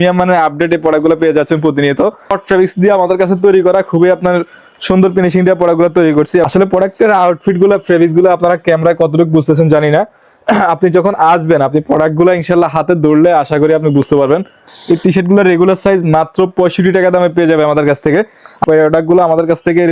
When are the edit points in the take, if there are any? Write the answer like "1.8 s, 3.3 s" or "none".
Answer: 2.4 s, 6.5 s, 14.7 s, 18.6 s